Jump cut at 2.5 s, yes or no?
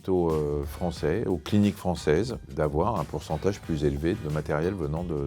yes